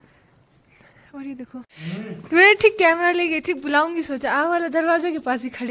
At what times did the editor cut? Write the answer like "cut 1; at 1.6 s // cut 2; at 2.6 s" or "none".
cut 1; at 1.7 s